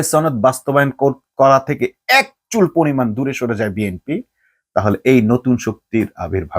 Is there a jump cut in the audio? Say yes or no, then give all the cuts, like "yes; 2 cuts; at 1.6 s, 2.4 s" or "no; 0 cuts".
no; 0 cuts